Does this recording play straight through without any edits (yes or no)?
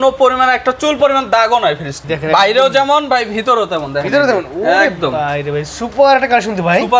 no